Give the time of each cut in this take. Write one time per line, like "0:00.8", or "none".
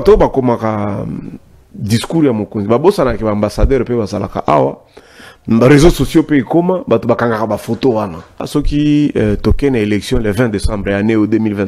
0:08.4